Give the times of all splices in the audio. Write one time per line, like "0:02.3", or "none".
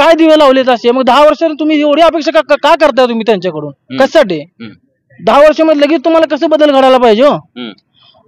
none